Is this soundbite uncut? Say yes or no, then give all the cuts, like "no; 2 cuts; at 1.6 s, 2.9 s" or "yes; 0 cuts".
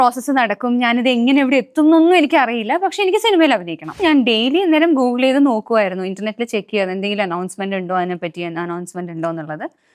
no; 1 cut; at 4.0 s